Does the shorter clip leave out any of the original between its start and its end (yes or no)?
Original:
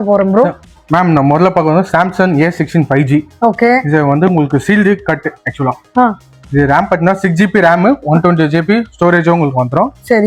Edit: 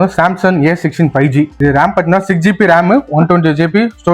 yes